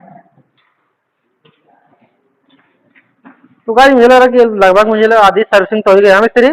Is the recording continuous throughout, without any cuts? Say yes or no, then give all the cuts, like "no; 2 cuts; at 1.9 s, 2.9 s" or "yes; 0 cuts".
yes; 0 cuts